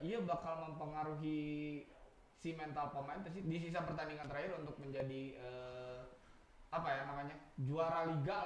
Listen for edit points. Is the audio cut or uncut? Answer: uncut